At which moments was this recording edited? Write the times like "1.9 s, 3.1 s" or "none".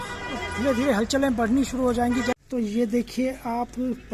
2.4 s